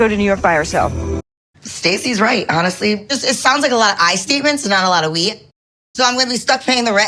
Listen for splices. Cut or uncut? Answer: cut